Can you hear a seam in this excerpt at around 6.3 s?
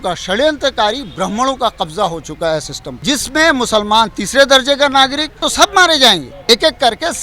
yes; 3 cuts; at 2.8 s, 5.4 s, 6.3 s

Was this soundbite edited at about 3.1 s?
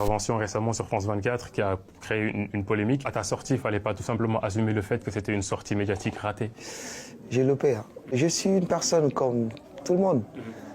yes; 3 cuts; at 3.1 s, 6.5 s, 8.2 s

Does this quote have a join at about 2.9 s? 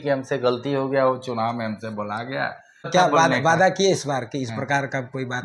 yes; 1 cut; at 2.9 s

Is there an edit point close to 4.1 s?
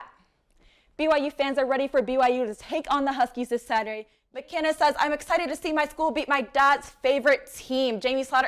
yes; 1 cut; at 4.1 s

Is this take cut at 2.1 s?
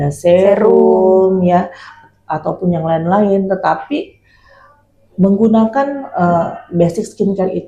no; 0 cuts

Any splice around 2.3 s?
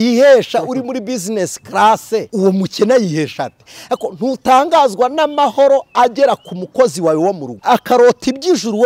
yes; 2 cuts; at 2.3 s, 7.5 s

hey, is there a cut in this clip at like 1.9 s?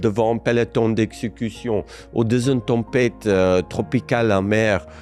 no; 0 cuts

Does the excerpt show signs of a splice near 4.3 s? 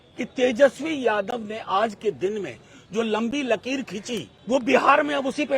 yes; 1 cut; at 4.3 s

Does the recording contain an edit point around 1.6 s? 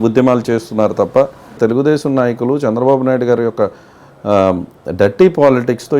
yes; 1 cut; at 1.6 s

